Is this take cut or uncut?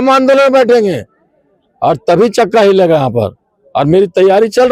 uncut